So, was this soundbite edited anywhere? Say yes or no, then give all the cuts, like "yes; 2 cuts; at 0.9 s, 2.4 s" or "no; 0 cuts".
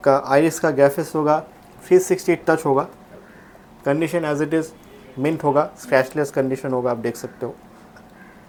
no; 0 cuts